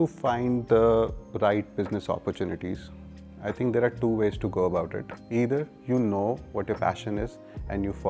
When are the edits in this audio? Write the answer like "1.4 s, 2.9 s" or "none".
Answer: none